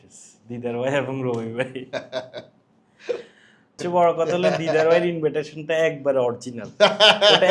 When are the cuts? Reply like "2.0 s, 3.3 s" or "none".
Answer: 3.8 s